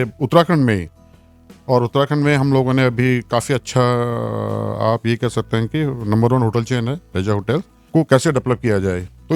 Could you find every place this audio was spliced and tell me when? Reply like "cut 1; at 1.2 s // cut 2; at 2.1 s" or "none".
cut 1; at 7.8 s